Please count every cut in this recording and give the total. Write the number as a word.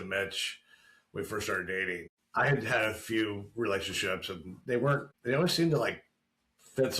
two